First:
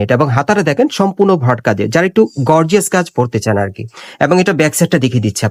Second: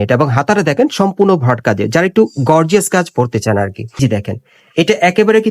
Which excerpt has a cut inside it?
second; 1 cut; at 4.0 s

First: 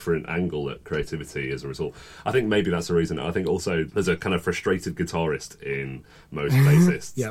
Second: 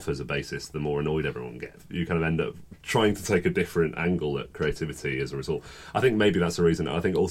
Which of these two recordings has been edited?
second; 1 cut; at 1.8 s

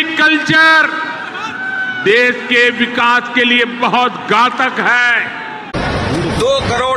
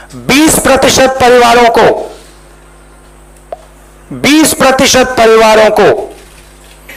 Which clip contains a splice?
first; 1 cut; at 5.7 s

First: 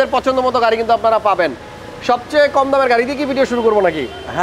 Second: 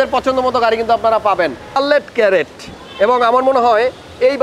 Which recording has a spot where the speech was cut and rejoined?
second; 1 cut; at 1.8 s

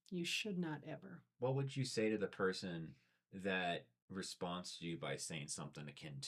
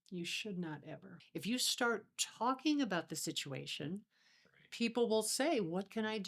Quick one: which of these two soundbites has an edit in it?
second; 1 cut; at 1.1 s

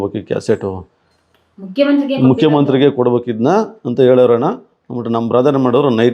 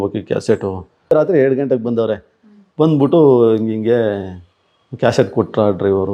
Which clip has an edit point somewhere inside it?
second; 1 cut; at 1.1 s

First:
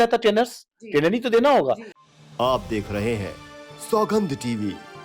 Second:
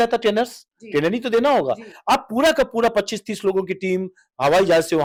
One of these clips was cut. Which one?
first; 1 cut; at 1.9 s

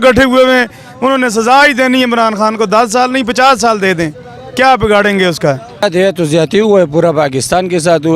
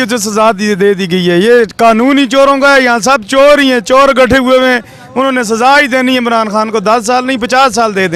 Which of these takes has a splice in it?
first; 1 cut; at 5.8 s

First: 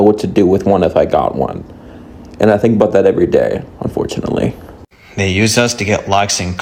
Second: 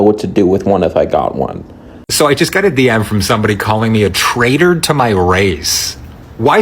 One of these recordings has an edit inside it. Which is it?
second; 1 cut; at 2.0 s

